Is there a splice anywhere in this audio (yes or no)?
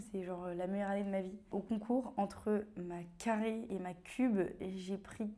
yes